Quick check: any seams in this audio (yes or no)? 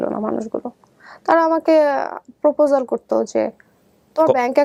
no